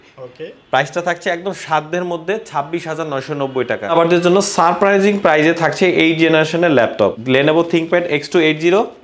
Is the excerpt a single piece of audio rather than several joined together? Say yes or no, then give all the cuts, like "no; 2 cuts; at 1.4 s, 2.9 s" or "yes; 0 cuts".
no; 2 cuts; at 3.9 s, 7.2 s